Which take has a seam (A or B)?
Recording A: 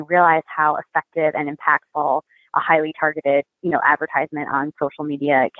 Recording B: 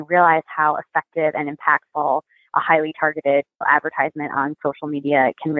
B